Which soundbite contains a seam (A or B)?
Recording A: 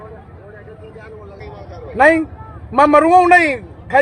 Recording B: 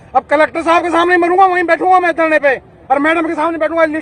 A